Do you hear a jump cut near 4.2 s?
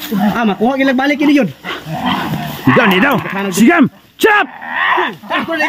no; 0 cuts

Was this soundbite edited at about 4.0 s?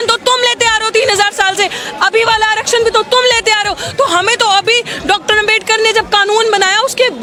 no; 0 cuts

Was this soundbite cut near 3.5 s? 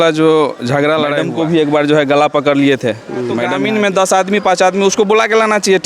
yes; 2 cuts; at 1.2 s, 3.5 s

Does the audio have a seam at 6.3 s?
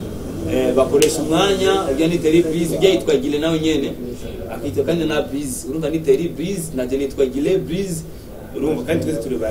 no; 0 cuts

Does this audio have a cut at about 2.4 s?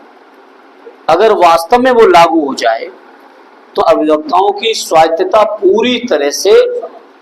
no; 1 cut; at 3.8 s

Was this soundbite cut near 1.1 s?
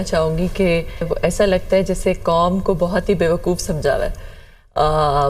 yes; 1 cut; at 1.1 s

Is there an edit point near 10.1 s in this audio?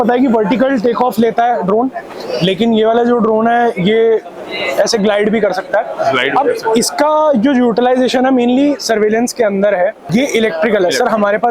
yes; 1 cut; at 10.1 s

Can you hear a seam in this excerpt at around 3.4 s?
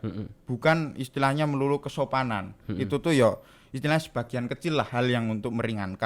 no; 0 cuts

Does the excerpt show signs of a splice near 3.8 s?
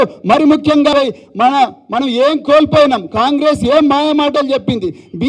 no; 1 cut; at 0.9 s

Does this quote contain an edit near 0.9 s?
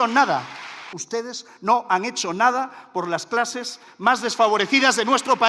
yes; 1 cut; at 0.9 s

